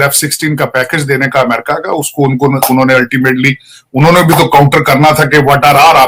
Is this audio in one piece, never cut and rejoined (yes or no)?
yes